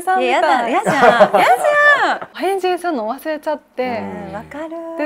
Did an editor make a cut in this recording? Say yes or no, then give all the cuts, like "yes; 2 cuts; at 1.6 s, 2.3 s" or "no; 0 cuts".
yes; 1 cut; at 2.3 s